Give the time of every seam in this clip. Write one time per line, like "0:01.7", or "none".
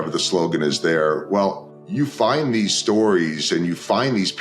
0:01.7